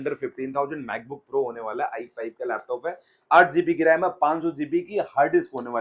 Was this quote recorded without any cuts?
yes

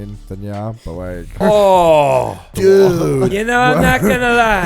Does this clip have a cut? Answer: yes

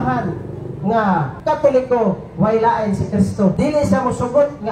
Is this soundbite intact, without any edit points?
no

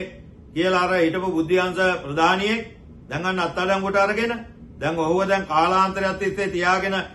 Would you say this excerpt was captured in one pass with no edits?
yes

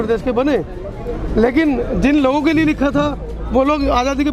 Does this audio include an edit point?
no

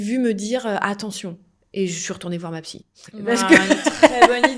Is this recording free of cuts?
yes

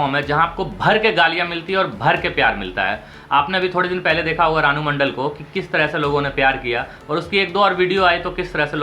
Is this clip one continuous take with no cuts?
yes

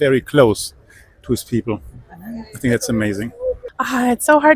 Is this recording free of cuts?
no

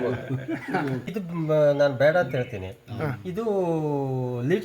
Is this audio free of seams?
no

